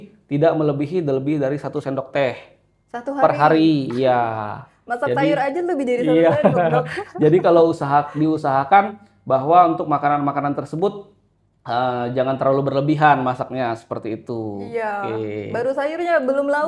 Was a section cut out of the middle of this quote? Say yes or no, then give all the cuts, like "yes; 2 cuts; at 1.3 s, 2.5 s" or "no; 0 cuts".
no; 0 cuts